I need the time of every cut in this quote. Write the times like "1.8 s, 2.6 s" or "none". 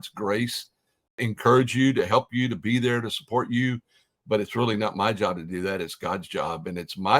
1.2 s